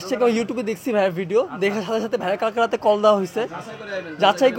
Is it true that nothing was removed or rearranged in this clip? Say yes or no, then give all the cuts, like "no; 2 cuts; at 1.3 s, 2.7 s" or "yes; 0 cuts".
yes; 0 cuts